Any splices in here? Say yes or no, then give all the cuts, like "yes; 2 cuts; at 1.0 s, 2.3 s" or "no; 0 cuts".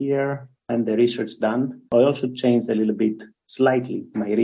no; 0 cuts